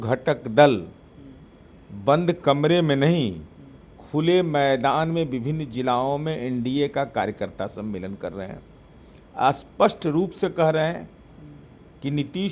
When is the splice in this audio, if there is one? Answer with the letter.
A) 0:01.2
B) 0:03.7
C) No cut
C